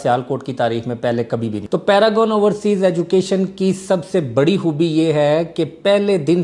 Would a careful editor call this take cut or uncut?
cut